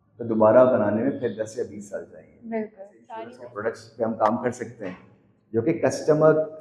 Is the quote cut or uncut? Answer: cut